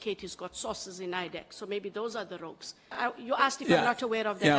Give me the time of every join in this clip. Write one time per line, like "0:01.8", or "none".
0:03.0